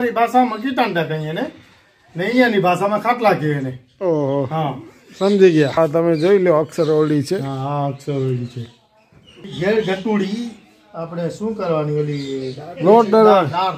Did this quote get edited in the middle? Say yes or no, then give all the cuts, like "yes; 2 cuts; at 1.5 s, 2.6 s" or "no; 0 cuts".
yes; 1 cut; at 9.5 s